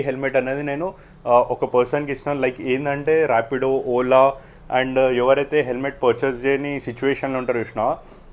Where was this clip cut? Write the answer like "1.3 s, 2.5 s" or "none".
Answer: none